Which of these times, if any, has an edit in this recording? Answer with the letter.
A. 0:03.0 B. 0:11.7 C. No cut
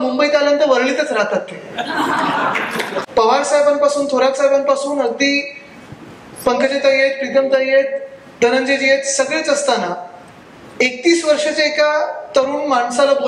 A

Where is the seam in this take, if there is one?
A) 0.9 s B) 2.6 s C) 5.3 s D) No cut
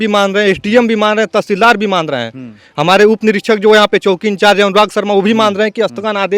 D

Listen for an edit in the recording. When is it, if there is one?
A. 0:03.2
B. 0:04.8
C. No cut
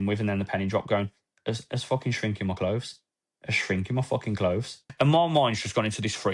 B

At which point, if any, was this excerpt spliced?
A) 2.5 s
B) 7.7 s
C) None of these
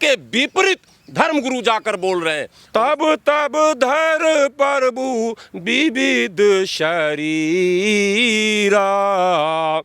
A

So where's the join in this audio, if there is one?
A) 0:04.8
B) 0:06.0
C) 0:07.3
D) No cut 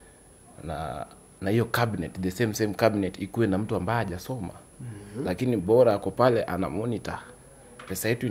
D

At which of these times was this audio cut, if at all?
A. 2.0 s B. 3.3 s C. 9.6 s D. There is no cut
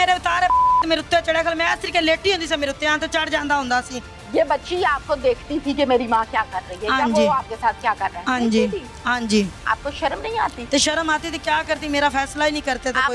C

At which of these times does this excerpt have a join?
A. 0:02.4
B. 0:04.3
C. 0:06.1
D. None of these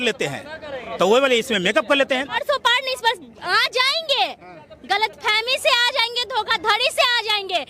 A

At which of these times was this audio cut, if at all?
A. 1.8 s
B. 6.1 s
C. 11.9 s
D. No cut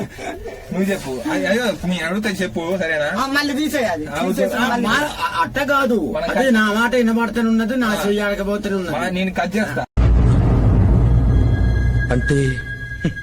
D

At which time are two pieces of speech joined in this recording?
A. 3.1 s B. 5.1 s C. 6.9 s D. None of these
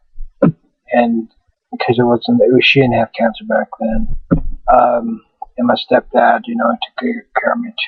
A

